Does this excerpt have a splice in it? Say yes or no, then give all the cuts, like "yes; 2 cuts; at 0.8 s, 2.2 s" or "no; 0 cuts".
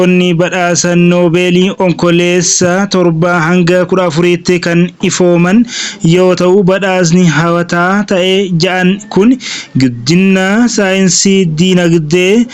no; 0 cuts